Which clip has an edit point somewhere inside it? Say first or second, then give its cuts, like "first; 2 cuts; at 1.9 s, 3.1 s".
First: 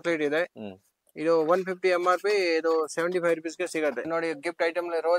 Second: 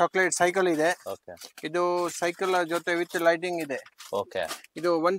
first; 1 cut; at 4.1 s